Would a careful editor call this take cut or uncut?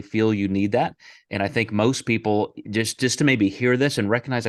uncut